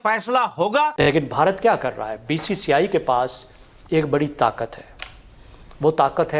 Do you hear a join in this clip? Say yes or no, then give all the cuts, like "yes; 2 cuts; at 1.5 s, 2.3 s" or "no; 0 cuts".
yes; 1 cut; at 1.0 s